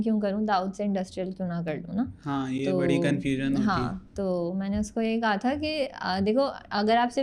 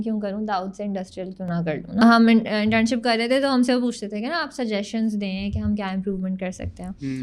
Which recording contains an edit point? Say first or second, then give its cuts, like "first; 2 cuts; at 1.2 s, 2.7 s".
second; 1 cut; at 2.0 s